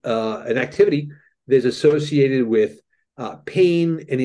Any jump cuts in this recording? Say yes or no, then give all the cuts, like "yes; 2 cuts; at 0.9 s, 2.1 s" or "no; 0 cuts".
no; 0 cuts